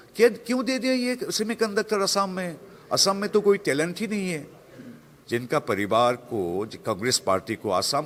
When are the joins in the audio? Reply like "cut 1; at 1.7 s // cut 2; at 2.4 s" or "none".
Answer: none